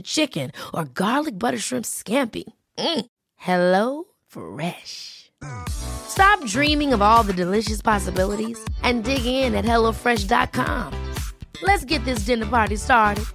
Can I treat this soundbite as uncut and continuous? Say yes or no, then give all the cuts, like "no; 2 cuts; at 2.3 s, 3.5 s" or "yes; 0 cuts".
yes; 0 cuts